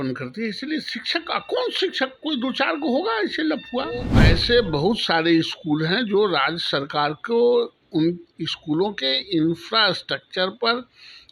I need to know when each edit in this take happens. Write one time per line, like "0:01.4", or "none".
0:04.2